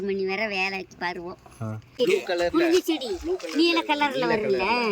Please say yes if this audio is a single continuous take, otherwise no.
no